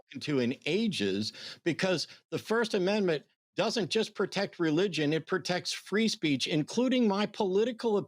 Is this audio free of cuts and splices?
yes; 0 cuts

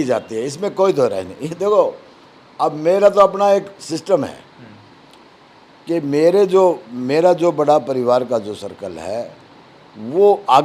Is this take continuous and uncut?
yes; 0 cuts

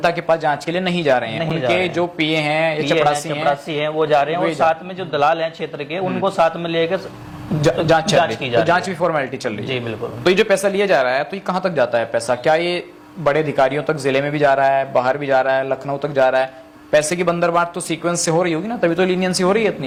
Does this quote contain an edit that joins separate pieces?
no; 0 cuts

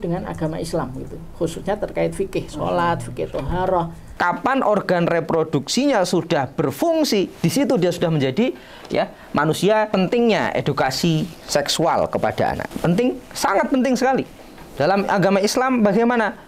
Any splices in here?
yes; 3 cuts; at 4.0 s, 9.9 s, 12.7 s

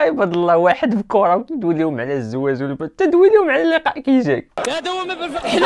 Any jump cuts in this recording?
yes; 1 cut; at 4.6 s

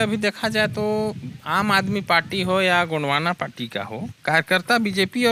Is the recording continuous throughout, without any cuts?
yes; 0 cuts

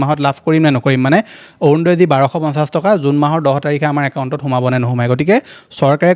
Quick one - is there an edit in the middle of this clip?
no; 0 cuts

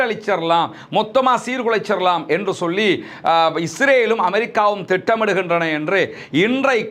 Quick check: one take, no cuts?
yes; 0 cuts

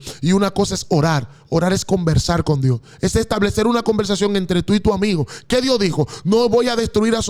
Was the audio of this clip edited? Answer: no; 0 cuts

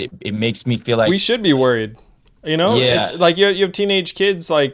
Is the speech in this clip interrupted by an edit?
yes; 1 cut; at 1.1 s

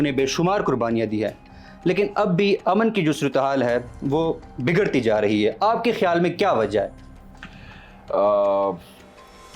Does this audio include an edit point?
no; 0 cuts

